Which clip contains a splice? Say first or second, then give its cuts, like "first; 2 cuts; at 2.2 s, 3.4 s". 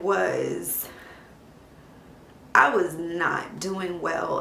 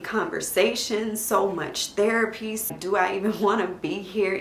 second; 1 cut; at 2.7 s